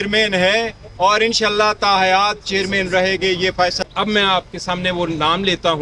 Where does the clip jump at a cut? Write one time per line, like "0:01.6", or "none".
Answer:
0:03.8